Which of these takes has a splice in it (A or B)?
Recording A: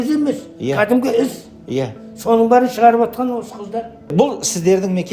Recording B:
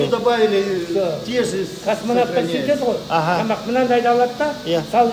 A